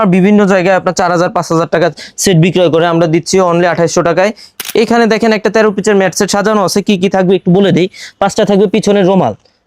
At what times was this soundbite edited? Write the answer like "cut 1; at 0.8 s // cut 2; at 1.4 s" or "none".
cut 1; at 4.5 s